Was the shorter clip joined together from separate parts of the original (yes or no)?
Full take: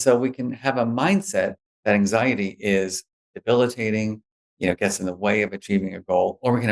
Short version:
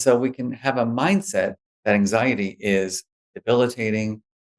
no